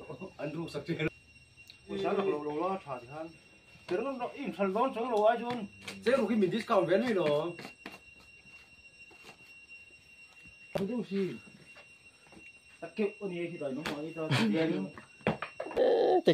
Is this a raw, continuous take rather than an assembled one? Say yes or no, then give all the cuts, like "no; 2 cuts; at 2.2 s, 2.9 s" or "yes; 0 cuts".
no; 1 cut; at 1.9 s